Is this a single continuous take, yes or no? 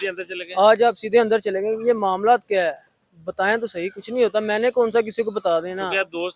yes